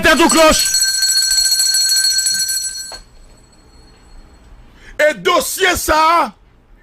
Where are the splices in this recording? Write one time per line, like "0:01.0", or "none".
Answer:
0:03.2